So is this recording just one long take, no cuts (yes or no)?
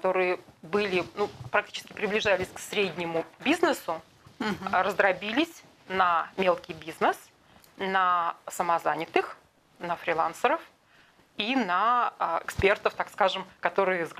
yes